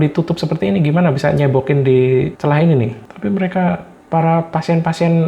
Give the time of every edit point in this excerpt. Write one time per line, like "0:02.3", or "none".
0:03.0

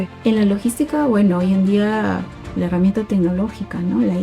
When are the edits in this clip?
none

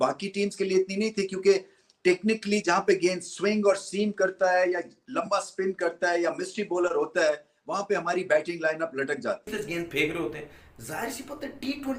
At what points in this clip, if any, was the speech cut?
0:09.6

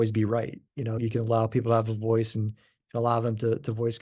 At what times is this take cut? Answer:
0:01.0

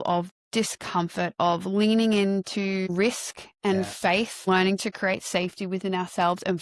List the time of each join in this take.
0:02.9
0:04.5

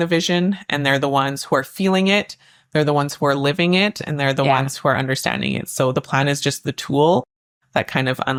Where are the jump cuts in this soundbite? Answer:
none

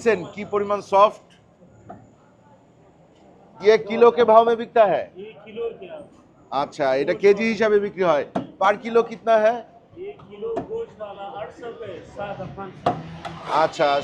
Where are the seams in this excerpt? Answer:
none

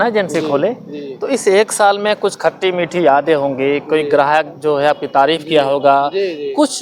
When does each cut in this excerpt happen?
none

